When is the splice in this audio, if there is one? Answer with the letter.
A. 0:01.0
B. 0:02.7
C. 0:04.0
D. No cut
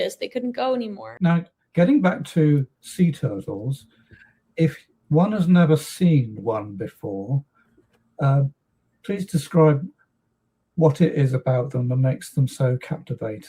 A